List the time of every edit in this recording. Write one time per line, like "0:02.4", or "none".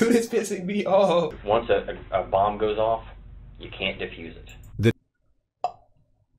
0:01.4